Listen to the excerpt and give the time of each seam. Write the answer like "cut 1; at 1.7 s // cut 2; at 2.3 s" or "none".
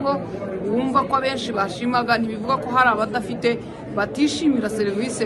none